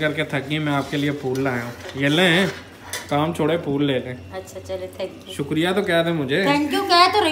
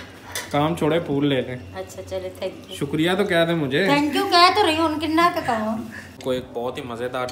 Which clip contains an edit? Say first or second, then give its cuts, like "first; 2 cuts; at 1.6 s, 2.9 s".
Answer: second; 1 cut; at 6.2 s